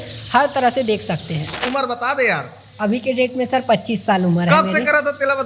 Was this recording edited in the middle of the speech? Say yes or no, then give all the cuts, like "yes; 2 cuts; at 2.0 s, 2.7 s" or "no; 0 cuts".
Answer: yes; 1 cut; at 1.6 s